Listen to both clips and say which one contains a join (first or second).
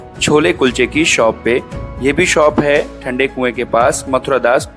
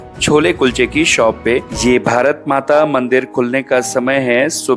second